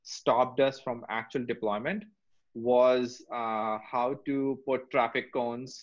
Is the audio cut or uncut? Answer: uncut